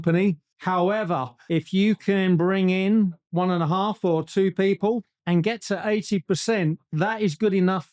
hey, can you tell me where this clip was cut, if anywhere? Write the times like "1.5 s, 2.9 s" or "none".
none